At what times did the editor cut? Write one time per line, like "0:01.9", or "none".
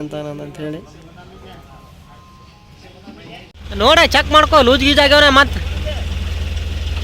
0:03.5